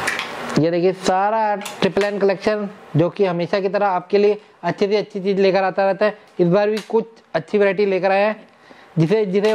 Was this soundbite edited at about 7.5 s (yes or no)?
no